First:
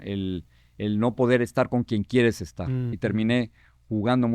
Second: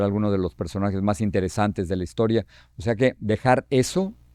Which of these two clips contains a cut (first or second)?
first